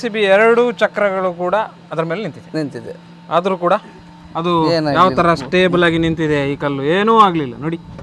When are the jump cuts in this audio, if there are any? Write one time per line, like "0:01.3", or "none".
none